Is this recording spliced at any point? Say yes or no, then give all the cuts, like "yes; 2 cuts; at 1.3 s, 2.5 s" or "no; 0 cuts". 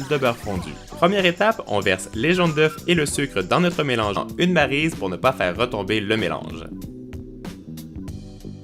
no; 0 cuts